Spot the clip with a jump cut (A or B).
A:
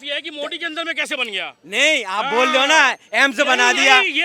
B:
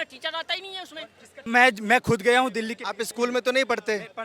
B